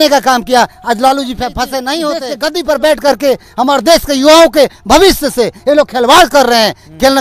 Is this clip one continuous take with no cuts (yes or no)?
no